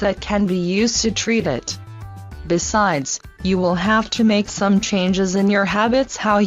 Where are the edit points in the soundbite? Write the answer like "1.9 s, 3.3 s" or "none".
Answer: none